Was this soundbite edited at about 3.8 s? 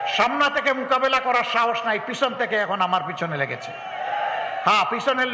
no; 0 cuts

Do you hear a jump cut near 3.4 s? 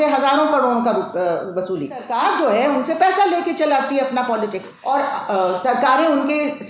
no; 2 cuts; at 2.0 s, 4.7 s

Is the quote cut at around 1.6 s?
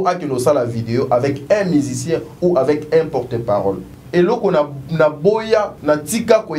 no; 2 cuts; at 3.9 s, 5.7 s

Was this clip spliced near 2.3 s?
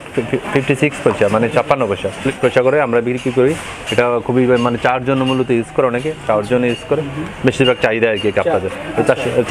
yes; 1 cut; at 2.3 s

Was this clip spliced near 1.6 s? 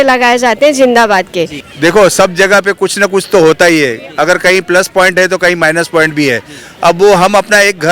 yes; 1 cut; at 1.6 s

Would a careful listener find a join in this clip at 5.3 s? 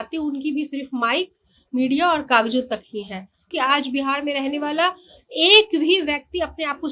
no; 1 cut; at 3.5 s

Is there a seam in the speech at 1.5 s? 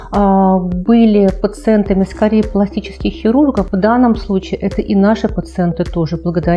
no; 1 cut; at 3.7 s

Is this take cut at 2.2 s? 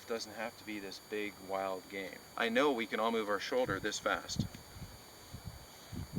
yes; 1 cut; at 2.2 s

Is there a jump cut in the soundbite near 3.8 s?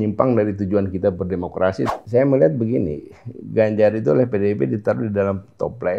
no; 1 cut; at 1.9 s

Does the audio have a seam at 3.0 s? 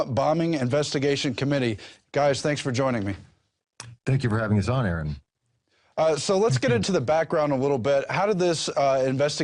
no; 1 cut; at 1.8 s

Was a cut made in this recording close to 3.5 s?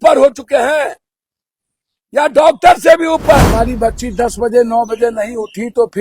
yes; 1 cut; at 3.5 s

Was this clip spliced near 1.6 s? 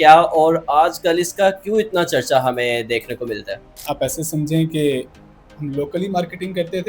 no; 1 cut; at 3.8 s

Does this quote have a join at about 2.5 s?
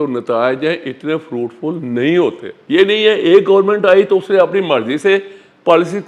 yes; 1 cut; at 2.5 s

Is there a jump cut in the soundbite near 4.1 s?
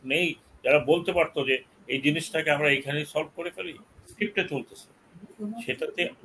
yes; 1 cut; at 4.1 s

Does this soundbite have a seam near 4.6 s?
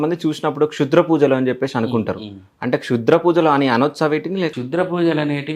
yes; 1 cut; at 4.6 s

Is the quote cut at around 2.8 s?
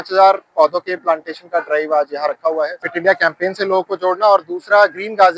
yes; 1 cut; at 2.8 s

